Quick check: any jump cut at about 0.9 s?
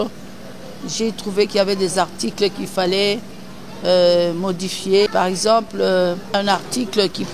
no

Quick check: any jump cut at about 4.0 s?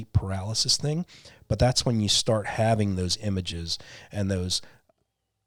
no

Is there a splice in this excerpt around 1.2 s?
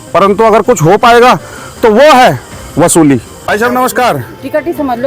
no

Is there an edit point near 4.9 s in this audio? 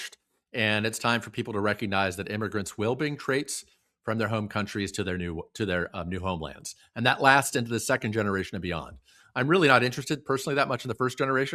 no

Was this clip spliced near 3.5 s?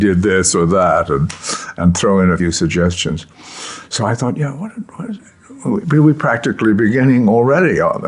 no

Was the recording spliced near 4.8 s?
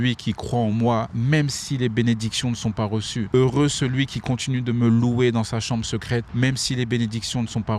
no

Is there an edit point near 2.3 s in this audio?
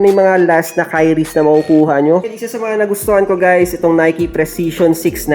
yes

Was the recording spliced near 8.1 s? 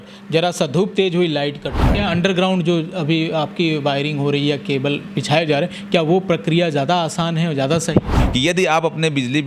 yes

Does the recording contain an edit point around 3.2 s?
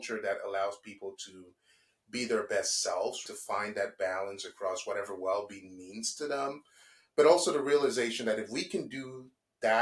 yes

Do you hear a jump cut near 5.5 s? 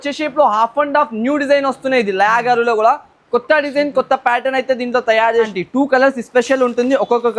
yes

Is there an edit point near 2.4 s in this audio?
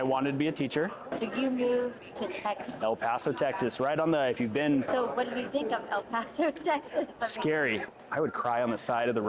no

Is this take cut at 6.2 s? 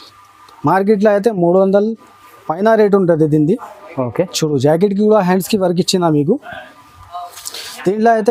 no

